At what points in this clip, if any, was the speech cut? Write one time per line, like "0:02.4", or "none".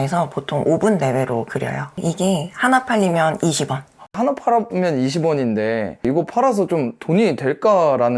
0:04.1
0:06.0